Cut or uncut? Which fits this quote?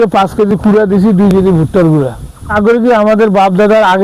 cut